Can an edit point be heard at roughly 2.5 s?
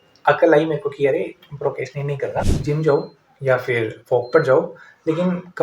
yes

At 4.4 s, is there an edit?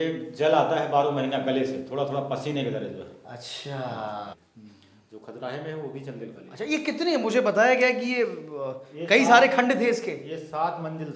yes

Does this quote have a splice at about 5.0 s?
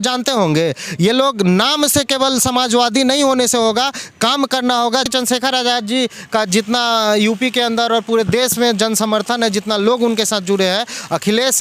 yes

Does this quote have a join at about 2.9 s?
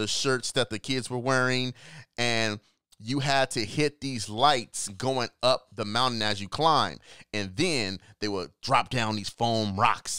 no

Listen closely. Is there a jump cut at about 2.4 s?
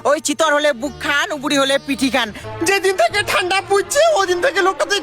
yes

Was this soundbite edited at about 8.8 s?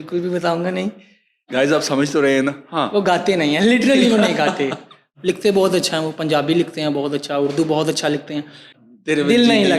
yes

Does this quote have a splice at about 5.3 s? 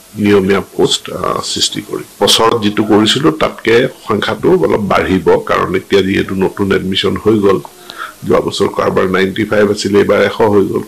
no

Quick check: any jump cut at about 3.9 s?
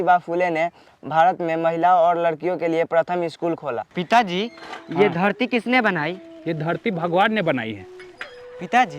yes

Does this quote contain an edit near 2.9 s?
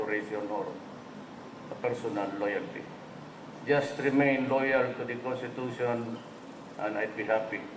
yes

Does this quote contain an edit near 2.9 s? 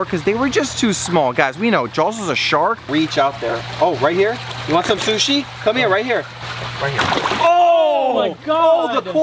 yes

